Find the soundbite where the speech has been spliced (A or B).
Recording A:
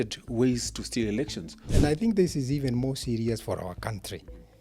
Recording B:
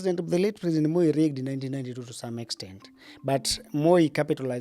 A